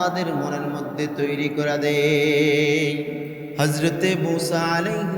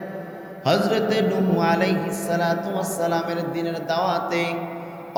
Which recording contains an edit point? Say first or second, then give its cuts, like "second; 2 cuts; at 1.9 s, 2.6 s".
first; 1 cut; at 3.4 s